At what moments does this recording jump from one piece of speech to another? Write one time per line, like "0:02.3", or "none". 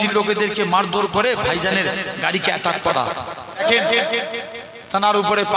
0:03.6